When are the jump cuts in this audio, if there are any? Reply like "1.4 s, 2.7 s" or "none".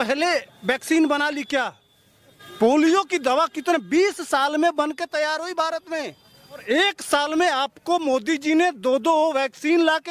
2.5 s, 6.6 s